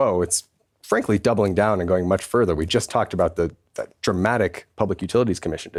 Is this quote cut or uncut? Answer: uncut